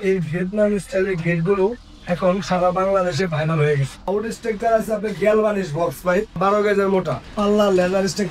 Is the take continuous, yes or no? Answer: no